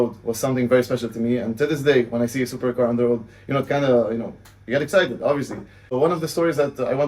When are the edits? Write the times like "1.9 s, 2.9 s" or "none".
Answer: 5.9 s